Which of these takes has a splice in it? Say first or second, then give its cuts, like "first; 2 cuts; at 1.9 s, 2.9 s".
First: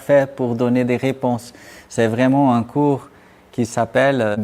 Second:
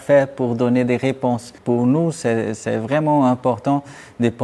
second; 1 cut; at 1.5 s